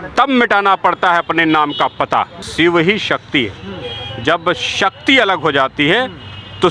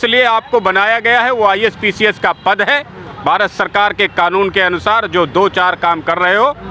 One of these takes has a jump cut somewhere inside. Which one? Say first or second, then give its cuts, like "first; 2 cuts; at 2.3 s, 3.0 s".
first; 1 cut; at 2.5 s